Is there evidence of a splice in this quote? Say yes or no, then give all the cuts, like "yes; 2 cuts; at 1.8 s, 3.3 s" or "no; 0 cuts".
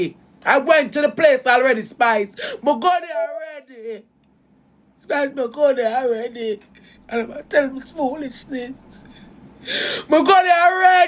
no; 0 cuts